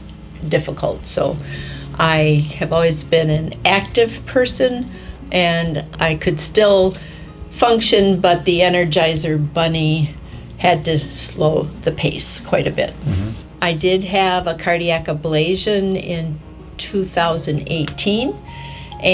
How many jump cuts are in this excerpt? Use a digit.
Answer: 2